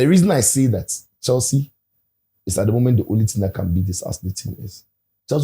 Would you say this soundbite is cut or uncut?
uncut